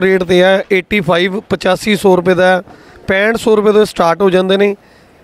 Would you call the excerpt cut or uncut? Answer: uncut